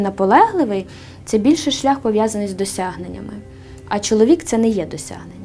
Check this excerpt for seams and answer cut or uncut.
uncut